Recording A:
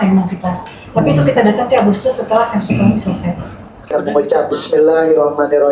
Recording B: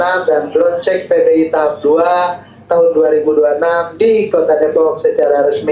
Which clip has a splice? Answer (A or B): A